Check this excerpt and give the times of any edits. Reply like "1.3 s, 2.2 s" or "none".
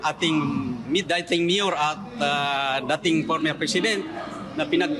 none